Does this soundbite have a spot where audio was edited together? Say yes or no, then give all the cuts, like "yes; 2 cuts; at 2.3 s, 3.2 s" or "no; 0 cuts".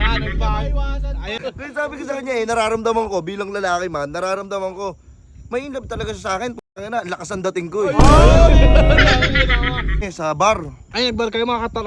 yes; 2 cuts; at 1.4 s, 10.1 s